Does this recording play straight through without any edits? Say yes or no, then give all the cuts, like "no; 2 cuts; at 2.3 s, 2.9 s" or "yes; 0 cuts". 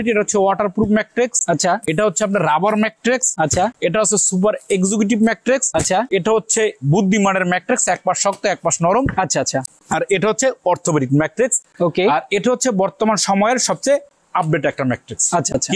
yes; 0 cuts